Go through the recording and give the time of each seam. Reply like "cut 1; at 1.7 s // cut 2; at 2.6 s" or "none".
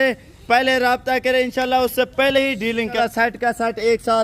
cut 1; at 3.0 s